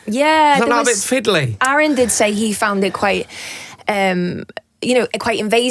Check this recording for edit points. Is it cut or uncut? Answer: cut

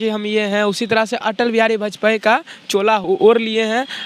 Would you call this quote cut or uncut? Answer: cut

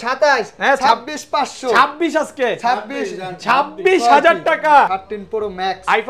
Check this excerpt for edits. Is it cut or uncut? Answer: cut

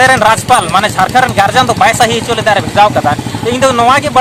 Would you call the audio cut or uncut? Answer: uncut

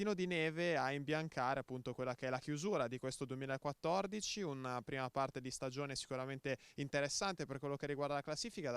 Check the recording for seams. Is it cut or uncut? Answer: cut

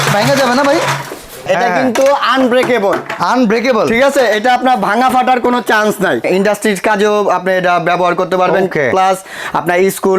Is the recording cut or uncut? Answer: cut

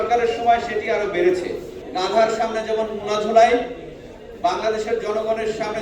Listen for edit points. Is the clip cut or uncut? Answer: cut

